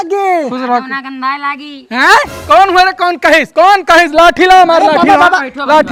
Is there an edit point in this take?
no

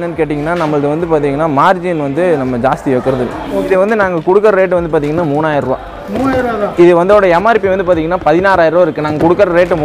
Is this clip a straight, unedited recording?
no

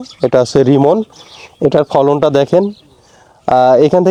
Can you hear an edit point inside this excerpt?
no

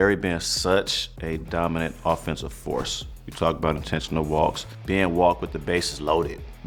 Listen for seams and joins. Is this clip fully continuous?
yes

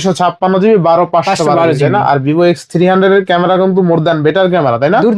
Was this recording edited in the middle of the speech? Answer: no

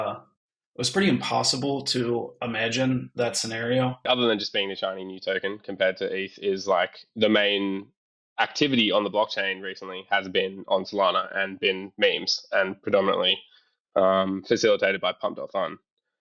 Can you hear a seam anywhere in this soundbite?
yes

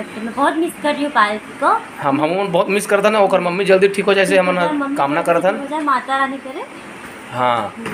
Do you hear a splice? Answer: no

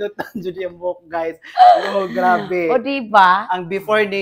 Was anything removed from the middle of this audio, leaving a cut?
no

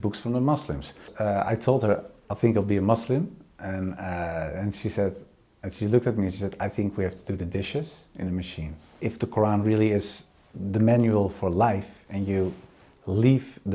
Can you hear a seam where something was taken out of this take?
yes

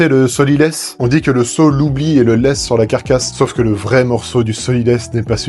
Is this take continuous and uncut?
no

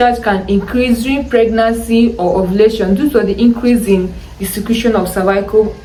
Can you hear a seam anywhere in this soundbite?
no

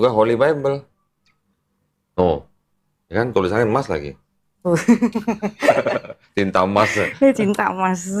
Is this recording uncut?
yes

